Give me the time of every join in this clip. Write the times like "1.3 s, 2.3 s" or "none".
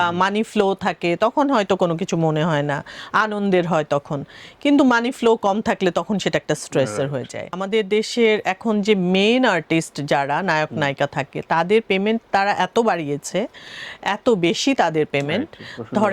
7.6 s